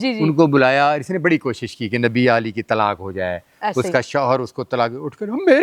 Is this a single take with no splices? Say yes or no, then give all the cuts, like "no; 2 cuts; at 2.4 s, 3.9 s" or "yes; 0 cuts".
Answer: yes; 0 cuts